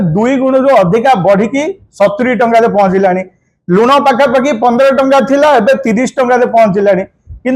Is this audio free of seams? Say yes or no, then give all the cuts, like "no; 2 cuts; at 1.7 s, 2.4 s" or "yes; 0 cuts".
yes; 0 cuts